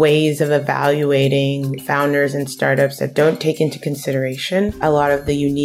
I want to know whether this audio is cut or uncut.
cut